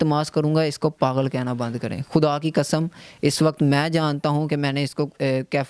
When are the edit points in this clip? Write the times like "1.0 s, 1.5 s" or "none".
none